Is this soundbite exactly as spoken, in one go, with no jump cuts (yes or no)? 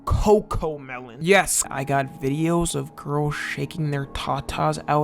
no